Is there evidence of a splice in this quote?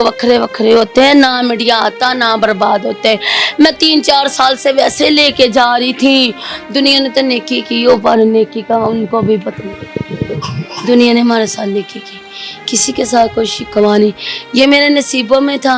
no; 0 cuts

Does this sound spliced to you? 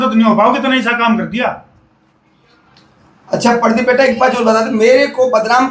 no; 0 cuts

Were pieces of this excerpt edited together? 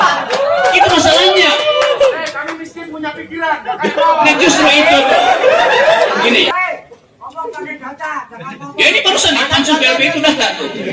yes; 1 cut; at 6.5 s

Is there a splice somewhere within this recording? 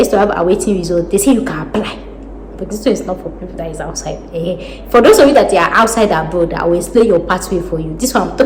no; 0 cuts

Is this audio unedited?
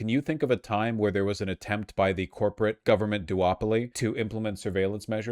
no; 2 cuts; at 2.8 s, 3.9 s

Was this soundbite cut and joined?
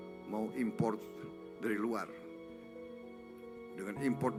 no; 0 cuts

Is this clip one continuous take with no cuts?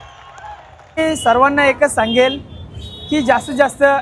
no; 1 cut; at 1.0 s

